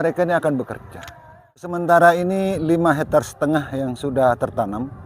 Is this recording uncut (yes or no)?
no